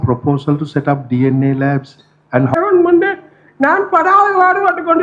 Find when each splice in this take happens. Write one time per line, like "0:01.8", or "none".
0:02.6